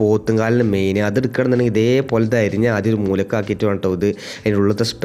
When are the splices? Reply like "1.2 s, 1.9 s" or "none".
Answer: none